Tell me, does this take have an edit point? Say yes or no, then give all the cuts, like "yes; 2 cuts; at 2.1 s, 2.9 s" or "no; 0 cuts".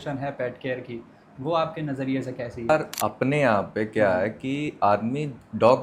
yes; 1 cut; at 2.7 s